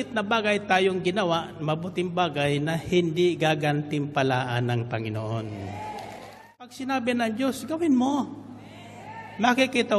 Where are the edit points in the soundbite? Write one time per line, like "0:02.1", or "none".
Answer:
0:06.7